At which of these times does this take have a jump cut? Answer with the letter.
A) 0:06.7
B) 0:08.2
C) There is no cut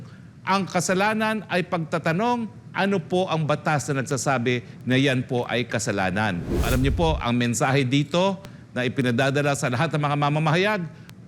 A